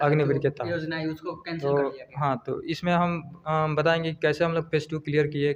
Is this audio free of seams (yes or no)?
yes